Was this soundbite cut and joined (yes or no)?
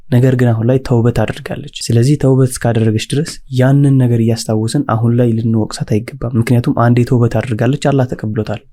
no